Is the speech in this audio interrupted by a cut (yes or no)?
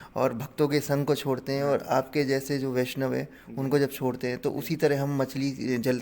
no